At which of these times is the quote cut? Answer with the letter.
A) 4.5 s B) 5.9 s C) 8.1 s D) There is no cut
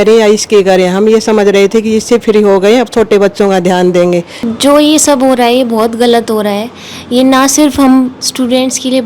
A